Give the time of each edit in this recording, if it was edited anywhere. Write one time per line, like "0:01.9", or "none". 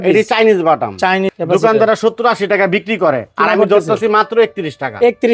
0:01.3